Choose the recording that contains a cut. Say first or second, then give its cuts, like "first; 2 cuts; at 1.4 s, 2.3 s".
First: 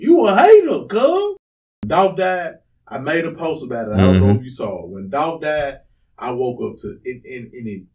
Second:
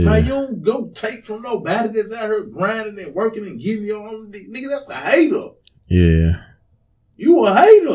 first; 1 cut; at 1.7 s